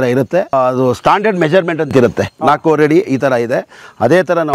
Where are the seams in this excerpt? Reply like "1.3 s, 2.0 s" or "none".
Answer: none